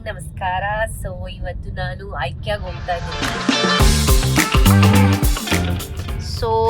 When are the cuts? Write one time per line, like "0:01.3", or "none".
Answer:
0:03.2